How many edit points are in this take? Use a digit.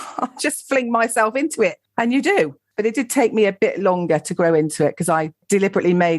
1